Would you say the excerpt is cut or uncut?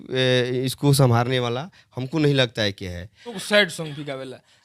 cut